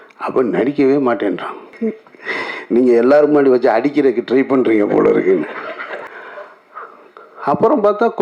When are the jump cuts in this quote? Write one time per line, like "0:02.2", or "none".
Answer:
0:01.6
0:06.1